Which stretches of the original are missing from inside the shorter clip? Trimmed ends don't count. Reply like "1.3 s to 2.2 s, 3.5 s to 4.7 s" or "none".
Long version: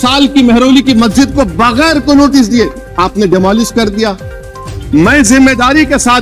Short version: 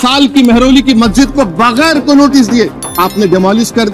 none